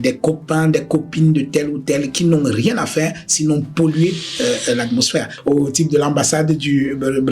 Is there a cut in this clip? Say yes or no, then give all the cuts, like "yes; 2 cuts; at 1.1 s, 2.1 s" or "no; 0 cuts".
yes; 1 cut; at 5.3 s